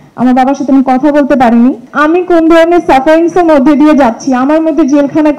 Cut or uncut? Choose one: cut